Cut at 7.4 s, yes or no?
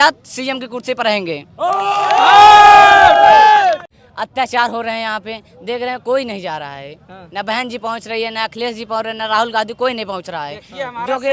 no